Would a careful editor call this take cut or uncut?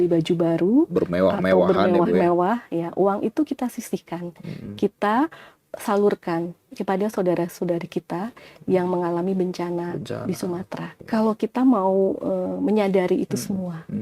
cut